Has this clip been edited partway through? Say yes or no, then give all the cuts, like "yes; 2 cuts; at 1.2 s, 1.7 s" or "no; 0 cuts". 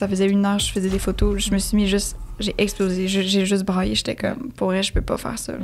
no; 0 cuts